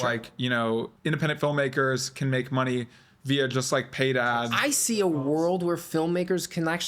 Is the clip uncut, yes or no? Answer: no